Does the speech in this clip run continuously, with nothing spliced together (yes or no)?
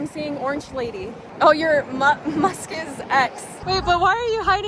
yes